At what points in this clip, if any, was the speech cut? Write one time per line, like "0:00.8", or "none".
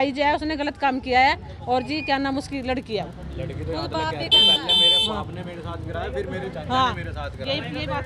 none